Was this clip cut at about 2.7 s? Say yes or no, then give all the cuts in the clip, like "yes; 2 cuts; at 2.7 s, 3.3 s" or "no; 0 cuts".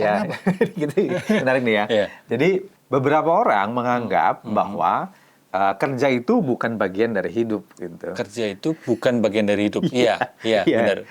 yes; 1 cut; at 2.7 s